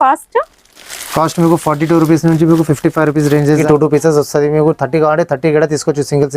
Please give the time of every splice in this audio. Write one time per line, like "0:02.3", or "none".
0:03.6